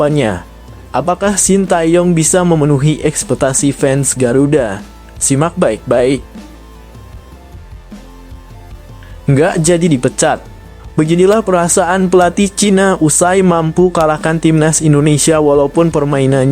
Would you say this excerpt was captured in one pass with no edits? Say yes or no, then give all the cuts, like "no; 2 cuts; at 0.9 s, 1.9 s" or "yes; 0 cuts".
no; 2 cuts; at 6.4 s, 9.2 s